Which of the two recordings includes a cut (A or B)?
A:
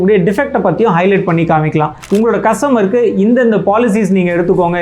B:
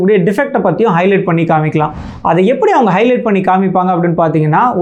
A